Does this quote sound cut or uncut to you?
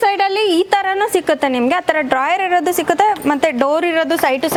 uncut